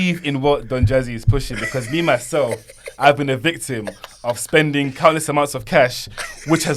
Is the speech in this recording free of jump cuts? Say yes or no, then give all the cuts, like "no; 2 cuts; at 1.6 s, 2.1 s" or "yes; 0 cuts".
yes; 0 cuts